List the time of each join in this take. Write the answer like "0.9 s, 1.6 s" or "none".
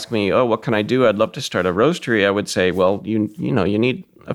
none